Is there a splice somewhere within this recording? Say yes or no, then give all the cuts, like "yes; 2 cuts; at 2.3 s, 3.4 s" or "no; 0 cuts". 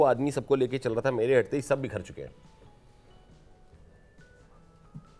no; 0 cuts